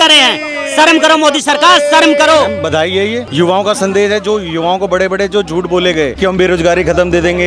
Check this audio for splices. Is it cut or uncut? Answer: cut